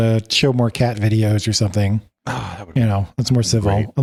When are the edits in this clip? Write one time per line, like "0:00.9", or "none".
none